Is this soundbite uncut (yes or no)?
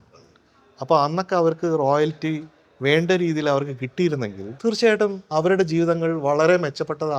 no